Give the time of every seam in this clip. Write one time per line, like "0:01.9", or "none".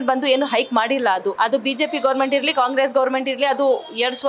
0:01.3